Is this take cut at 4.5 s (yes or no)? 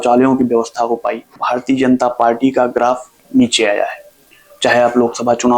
no